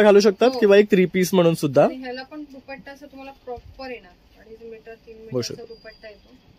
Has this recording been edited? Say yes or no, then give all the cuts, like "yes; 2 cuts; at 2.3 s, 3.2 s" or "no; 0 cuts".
no; 0 cuts